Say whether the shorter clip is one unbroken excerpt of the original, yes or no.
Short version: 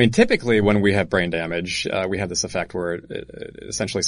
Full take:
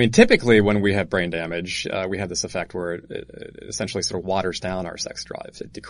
yes